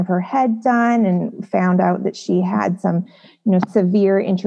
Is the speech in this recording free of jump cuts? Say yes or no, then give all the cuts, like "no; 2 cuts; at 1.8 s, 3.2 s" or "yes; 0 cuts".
yes; 0 cuts